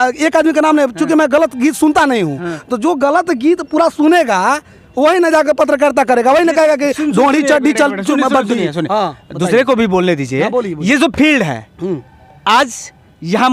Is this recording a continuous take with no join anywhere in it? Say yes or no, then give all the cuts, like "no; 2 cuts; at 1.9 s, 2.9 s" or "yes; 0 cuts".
yes; 0 cuts